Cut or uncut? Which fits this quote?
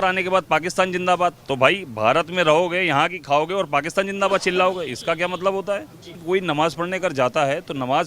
cut